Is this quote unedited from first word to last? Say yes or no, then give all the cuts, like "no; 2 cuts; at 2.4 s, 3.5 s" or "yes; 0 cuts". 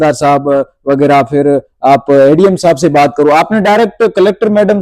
yes; 0 cuts